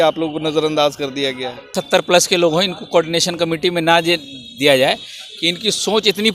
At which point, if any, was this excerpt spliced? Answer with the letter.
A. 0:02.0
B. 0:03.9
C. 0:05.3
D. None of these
A